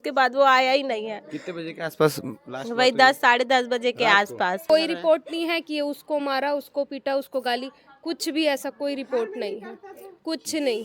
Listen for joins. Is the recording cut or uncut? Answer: cut